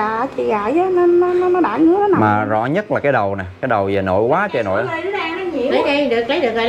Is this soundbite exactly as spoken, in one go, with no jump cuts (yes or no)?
yes